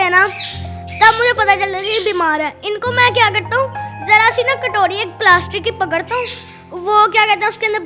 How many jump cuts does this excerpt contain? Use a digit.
0